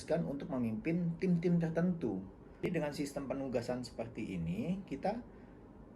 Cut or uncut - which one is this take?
cut